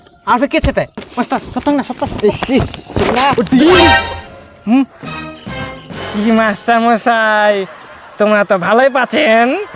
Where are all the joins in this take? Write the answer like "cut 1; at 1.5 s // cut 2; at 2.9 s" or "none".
cut 1; at 1.1 s